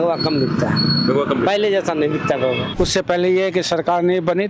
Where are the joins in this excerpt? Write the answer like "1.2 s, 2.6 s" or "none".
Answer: 2.7 s